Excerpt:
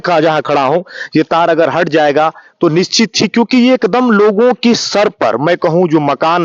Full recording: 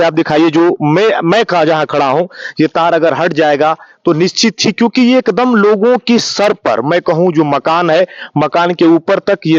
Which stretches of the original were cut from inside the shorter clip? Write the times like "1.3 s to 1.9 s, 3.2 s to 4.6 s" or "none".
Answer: none